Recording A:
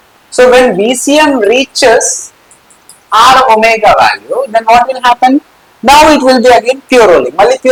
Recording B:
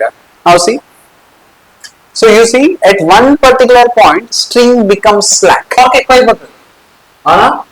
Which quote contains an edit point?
B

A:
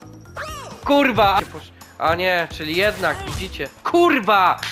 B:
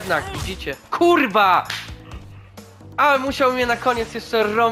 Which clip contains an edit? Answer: A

